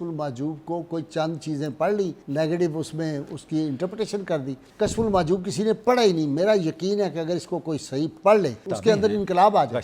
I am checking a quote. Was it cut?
yes; 3 cuts; at 2.2 s, 4.6 s, 8.7 s

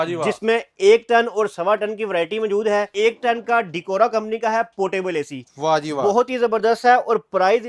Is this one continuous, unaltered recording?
no; 1 cut; at 2.9 s

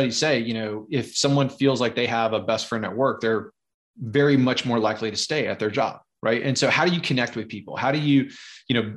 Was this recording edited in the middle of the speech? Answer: no; 0 cuts

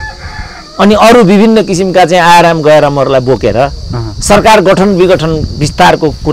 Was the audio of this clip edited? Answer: no; 0 cuts

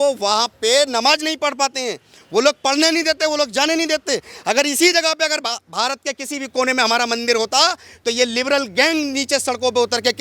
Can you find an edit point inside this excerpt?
no; 0 cuts

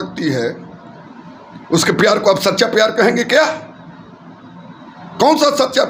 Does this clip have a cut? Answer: no; 0 cuts

